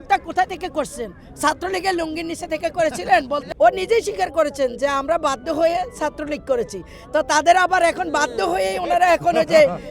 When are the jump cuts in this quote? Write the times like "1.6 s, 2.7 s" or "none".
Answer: 3.4 s